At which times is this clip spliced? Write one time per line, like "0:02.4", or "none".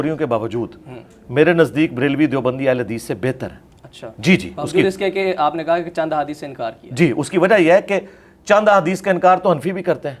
none